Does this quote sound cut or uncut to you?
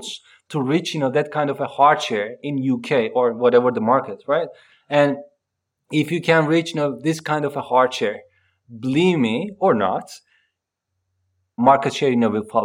cut